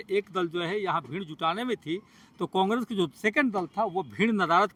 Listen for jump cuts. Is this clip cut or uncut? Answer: uncut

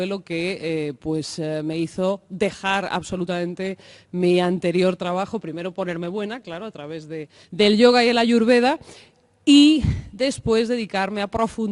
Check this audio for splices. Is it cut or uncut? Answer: uncut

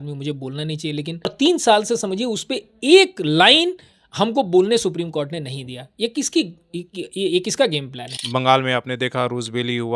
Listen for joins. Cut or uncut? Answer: cut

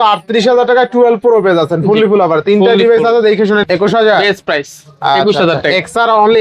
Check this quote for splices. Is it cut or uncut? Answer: cut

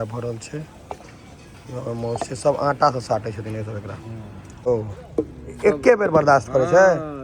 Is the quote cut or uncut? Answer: cut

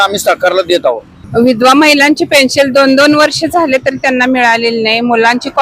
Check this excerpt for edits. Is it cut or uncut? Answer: cut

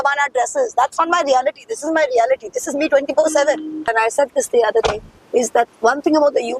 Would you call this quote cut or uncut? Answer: cut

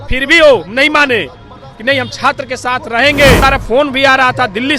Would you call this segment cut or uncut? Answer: cut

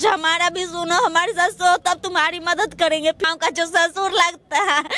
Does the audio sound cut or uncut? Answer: cut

